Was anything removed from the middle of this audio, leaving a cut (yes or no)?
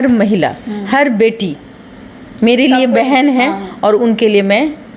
no